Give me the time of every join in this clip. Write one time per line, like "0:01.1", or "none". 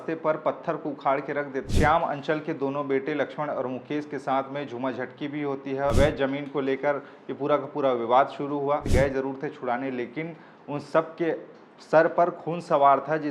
0:01.7
0:05.9
0:08.9